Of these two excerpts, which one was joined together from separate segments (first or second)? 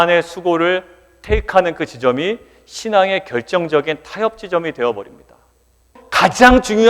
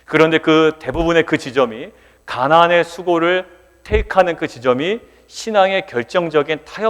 first